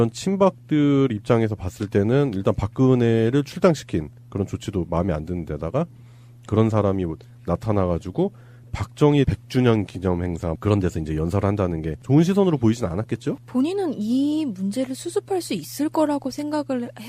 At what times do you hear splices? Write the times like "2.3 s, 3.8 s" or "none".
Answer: 8.0 s